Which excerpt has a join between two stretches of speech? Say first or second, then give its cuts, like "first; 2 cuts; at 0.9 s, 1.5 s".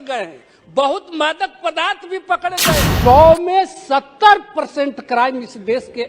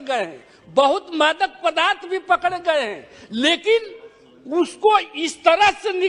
first; 1 cut; at 2.9 s